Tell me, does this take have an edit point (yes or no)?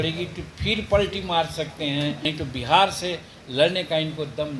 yes